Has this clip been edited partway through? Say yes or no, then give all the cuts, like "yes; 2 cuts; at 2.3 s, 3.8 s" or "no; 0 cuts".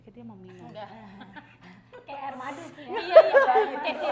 no; 0 cuts